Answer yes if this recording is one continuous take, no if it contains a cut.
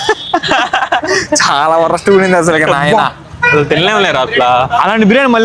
yes